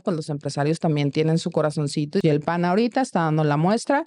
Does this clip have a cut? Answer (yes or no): yes